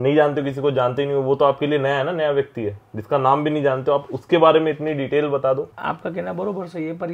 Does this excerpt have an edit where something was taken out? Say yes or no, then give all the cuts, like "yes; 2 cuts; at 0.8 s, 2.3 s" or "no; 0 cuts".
yes; 1 cut; at 5.8 s